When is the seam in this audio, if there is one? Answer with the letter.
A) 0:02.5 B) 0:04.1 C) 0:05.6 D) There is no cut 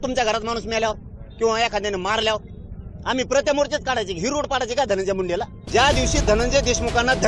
C